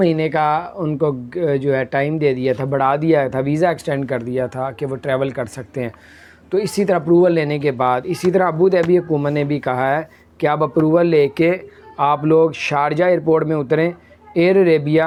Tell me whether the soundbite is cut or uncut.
uncut